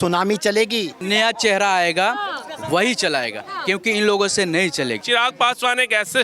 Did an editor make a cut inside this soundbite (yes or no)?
yes